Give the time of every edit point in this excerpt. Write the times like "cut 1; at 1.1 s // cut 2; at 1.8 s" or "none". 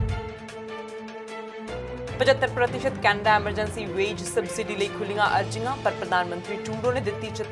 cut 1; at 2.2 s